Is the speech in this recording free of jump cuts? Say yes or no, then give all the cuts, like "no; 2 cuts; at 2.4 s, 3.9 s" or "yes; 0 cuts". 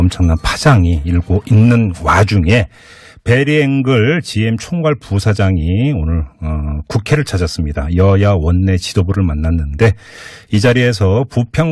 yes; 0 cuts